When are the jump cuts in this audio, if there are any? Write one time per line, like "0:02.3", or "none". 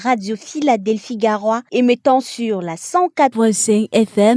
0:03.2